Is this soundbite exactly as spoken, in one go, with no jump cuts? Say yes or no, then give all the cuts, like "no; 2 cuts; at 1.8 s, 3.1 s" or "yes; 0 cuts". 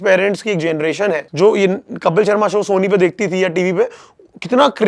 no; 1 cut; at 1.3 s